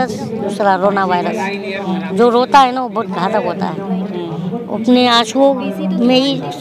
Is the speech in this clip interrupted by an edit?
no; 0 cuts

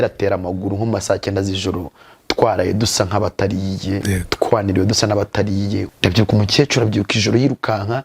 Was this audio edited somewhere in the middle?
yes; 1 cut; at 5.9 s

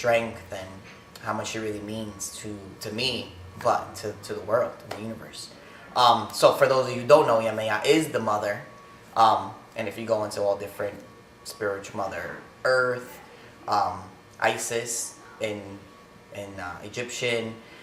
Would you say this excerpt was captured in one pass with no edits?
yes; 0 cuts

